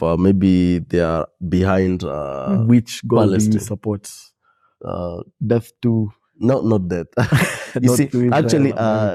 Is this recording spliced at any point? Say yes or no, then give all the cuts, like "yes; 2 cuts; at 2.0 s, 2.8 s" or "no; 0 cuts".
no; 0 cuts